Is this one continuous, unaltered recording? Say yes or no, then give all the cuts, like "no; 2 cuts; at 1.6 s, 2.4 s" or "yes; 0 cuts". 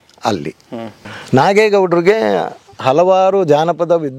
no; 1 cut; at 1.1 s